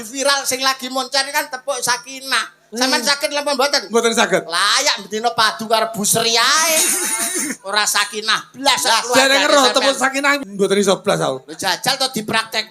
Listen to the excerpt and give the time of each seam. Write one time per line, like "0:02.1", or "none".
0:10.4